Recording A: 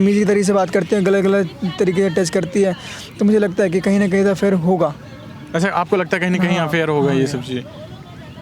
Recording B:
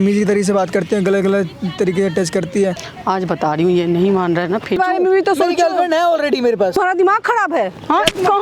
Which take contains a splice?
B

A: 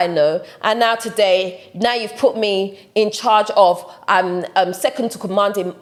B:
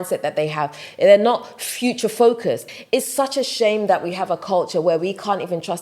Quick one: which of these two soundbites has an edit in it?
B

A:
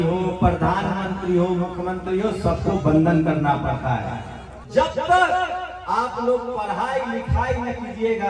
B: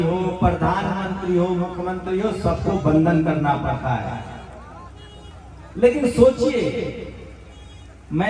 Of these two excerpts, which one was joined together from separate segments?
A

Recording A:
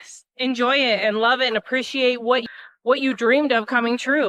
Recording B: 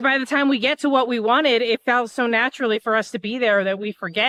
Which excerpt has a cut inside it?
A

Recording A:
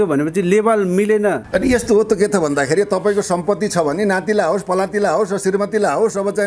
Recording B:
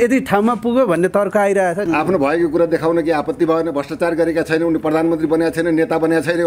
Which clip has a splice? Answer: B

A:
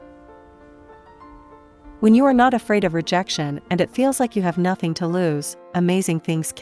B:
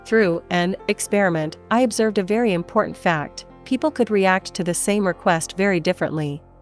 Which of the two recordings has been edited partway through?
A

